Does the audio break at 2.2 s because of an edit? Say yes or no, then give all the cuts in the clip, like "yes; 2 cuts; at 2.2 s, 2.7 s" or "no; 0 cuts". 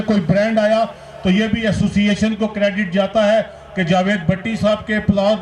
no; 0 cuts